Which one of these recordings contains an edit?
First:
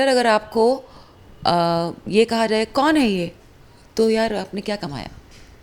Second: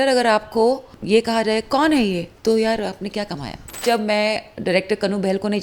second; 3 cuts; at 0.9 s, 2.3 s, 3.8 s

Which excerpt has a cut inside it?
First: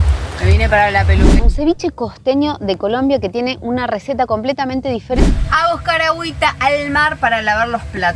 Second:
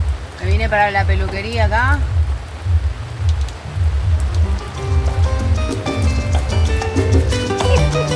first; 2 cuts; at 1.5 s, 5.2 s

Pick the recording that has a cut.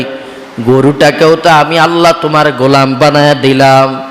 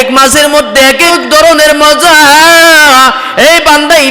second; 1 cut; at 1.1 s

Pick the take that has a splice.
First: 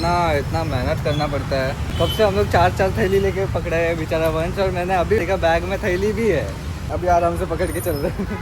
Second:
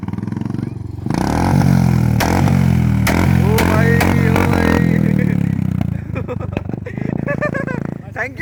first; 3 cuts; at 1.9 s, 5.2 s, 6.9 s

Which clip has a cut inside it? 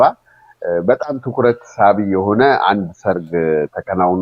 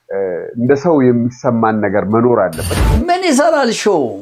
second; 1 cut; at 2.8 s

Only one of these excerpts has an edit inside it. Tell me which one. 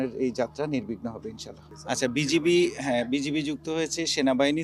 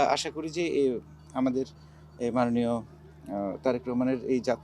first; 1 cut; at 1.6 s

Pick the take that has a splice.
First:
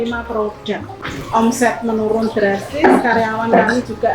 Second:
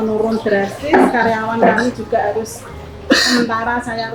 first; 1 cut; at 1.0 s

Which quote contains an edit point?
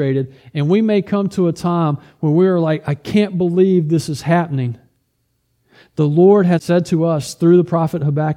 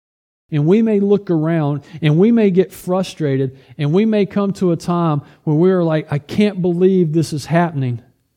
first; 1 cut; at 6.6 s

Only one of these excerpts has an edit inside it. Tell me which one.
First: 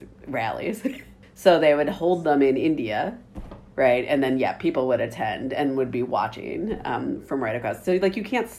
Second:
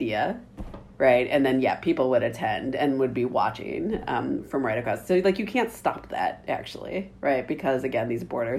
first; 1 cut; at 1.1 s

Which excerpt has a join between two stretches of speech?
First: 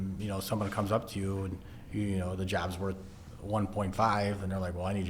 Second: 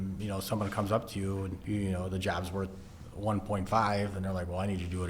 second; 1 cut; at 1.6 s

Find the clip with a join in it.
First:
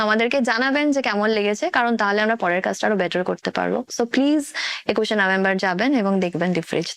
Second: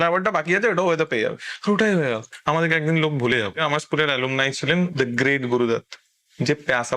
second; 3 cuts; at 2.3 s, 3.6 s, 4.9 s

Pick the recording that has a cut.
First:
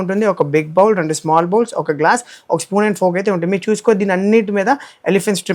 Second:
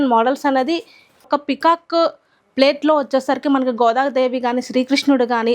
second; 1 cut; at 1.2 s

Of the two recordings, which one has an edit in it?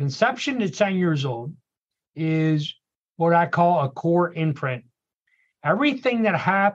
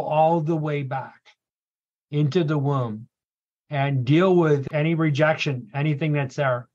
second; 1 cut; at 4.6 s

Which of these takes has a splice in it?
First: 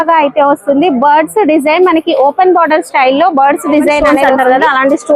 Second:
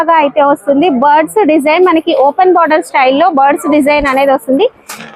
first; 1 cut; at 4.0 s

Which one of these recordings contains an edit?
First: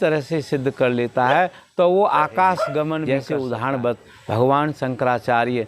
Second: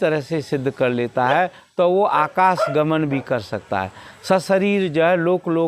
first; 1 cut; at 3.0 s

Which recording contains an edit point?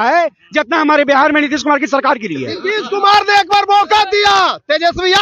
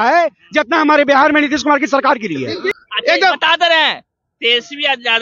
second; 1 cut; at 2.7 s

